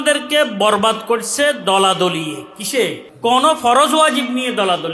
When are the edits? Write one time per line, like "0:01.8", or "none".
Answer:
0:03.0

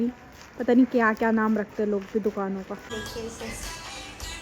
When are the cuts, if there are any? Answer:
0:02.8

